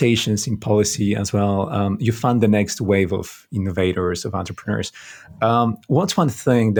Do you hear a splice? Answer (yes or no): no